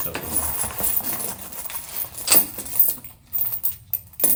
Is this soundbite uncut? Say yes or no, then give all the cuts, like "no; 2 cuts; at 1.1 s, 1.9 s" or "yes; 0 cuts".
yes; 0 cuts